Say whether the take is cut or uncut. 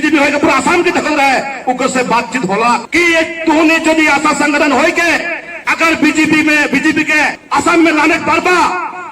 cut